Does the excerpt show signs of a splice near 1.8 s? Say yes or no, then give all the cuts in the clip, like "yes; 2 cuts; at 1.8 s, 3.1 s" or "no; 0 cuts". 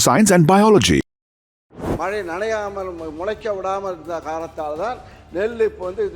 yes; 1 cut; at 1.8 s